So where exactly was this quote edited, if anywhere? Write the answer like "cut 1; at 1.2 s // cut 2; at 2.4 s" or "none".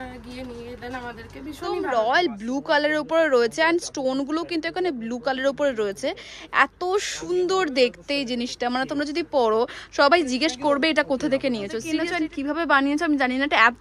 cut 1; at 1.8 s // cut 2; at 11.9 s